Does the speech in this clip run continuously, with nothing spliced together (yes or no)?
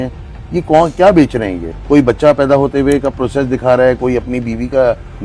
no